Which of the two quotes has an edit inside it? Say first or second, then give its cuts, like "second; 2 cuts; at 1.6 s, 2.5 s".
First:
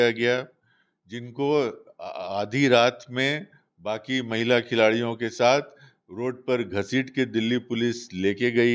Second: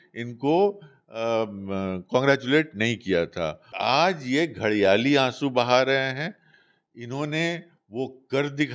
second; 1 cut; at 3.7 s